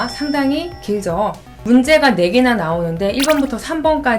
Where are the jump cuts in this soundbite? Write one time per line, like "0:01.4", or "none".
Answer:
0:01.5